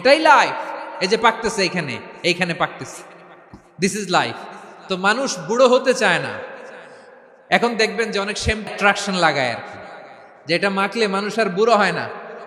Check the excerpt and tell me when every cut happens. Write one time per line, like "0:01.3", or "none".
0:08.7